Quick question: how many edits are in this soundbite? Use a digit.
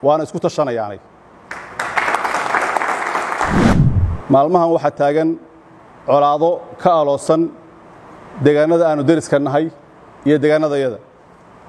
1